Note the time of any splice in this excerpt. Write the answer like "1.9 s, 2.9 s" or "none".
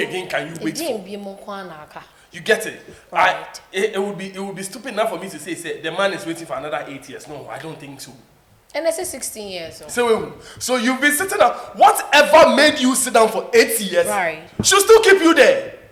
none